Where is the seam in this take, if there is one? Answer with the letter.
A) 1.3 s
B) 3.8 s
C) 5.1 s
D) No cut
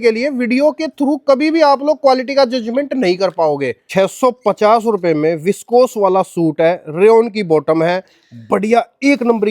B